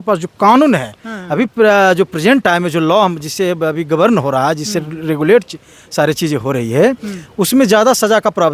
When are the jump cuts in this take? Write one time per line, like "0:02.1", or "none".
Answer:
none